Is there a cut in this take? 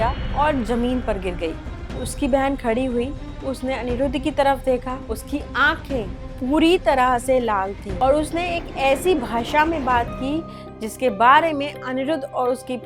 yes; 2 cuts; at 1.7 s, 7.8 s

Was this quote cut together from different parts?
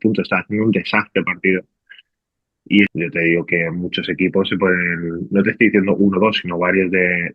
yes; 1 cut; at 2.9 s

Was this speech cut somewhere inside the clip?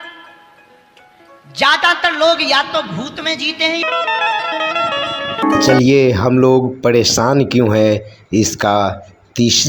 yes; 2 cuts; at 3.8 s, 5.4 s

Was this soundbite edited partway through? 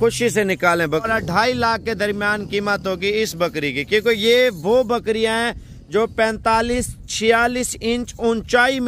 yes; 1 cut; at 1.1 s

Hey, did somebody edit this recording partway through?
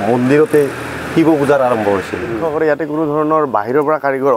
yes; 1 cut; at 2.3 s

